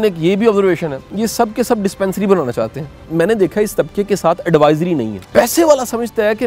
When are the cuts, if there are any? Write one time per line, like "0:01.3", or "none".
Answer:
0:03.0
0:05.2